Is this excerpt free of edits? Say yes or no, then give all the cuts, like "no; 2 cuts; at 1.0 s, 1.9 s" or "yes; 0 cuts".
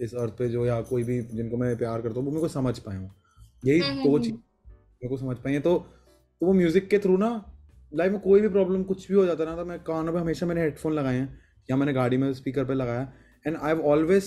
yes; 0 cuts